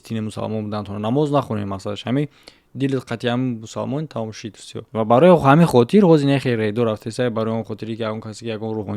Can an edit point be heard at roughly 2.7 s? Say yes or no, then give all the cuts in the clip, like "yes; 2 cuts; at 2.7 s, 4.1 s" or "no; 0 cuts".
no; 1 cut; at 4.7 s